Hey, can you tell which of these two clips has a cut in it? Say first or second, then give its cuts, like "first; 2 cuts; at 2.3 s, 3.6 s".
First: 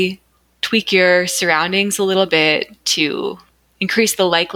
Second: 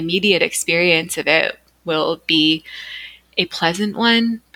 first; 1 cut; at 3.6 s